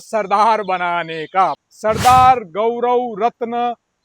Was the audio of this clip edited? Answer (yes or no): yes